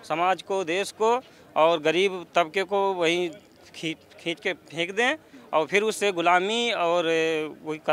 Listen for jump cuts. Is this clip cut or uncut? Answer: uncut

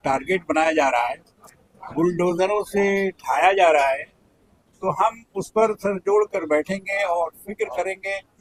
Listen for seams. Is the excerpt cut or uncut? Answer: uncut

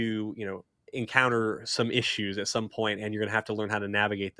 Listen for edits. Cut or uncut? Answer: uncut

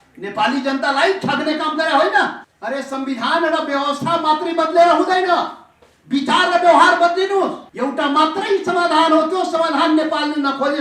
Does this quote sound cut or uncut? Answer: cut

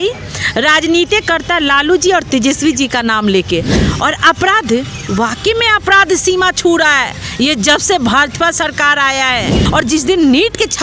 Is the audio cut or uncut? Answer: cut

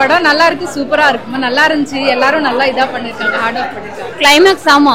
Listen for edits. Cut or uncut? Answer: cut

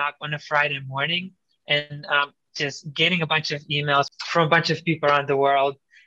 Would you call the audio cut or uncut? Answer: cut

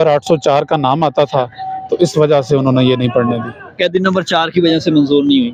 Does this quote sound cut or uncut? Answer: uncut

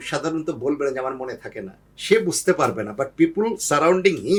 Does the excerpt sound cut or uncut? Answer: uncut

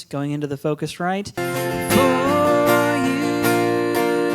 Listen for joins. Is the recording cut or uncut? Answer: cut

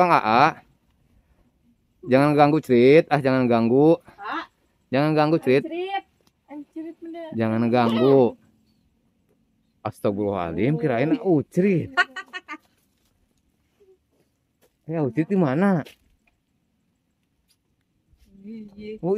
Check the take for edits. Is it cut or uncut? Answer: uncut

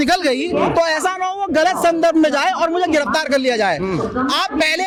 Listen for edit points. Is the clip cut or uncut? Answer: uncut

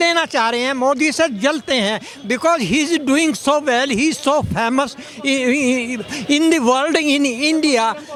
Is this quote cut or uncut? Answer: uncut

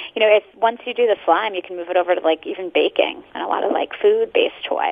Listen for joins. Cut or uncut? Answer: cut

